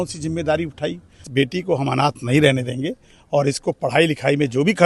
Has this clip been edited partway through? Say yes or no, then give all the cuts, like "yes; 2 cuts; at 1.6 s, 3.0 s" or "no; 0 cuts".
yes; 1 cut; at 1.3 s